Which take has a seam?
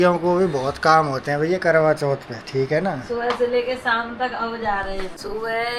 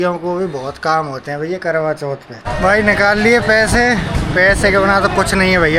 second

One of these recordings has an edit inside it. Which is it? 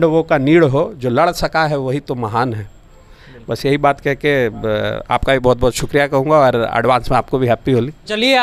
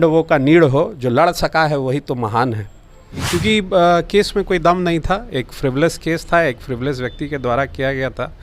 second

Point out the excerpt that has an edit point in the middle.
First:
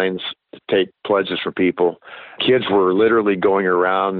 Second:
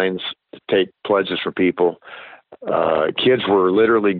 first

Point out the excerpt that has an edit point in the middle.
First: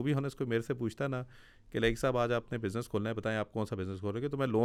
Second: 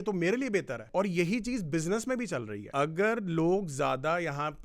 second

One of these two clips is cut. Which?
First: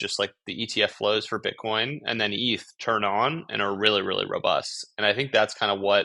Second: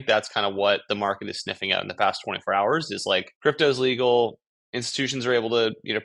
second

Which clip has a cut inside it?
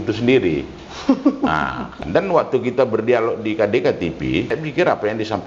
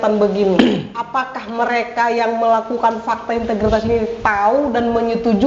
first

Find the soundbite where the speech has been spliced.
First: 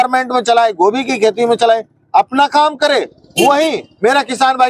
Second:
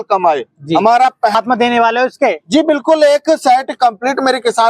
second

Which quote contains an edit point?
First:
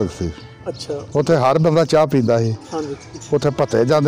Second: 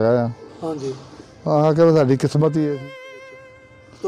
second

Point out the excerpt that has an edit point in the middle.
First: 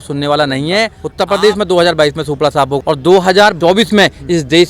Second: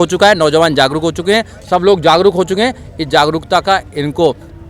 first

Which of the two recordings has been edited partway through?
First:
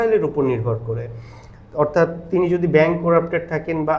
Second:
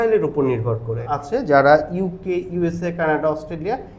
second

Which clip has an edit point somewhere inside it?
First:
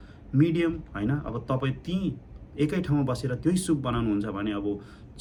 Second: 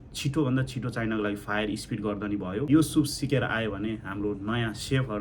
second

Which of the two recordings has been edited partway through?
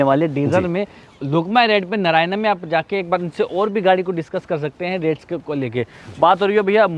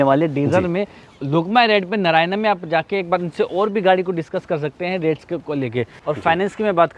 second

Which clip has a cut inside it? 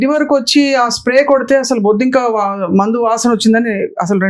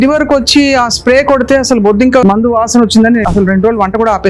second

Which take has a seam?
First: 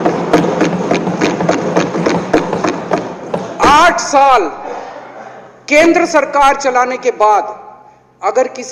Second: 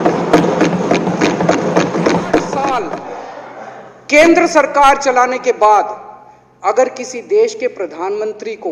second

